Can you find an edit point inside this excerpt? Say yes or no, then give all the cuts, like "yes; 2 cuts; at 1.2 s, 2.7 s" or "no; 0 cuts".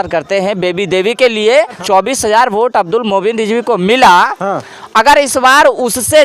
yes; 1 cut; at 1.8 s